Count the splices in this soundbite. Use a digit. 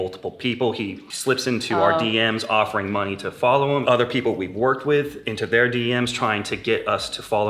2